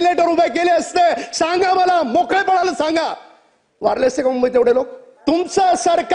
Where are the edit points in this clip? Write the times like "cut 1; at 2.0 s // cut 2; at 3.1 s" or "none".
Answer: cut 1; at 5.0 s